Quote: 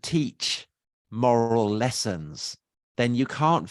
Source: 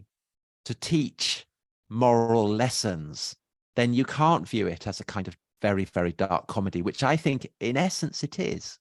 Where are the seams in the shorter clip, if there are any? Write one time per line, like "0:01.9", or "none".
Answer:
none